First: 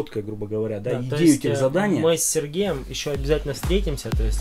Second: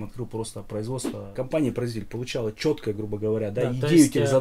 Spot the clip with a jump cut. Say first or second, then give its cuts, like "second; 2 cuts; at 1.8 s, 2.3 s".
second; 1 cut; at 1.2 s